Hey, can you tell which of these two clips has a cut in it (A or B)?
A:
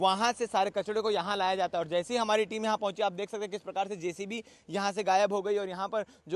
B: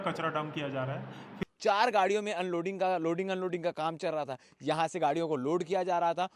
B